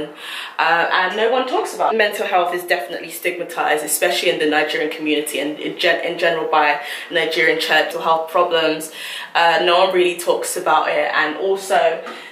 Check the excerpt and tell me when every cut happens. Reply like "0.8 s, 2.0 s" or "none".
1.9 s, 7.9 s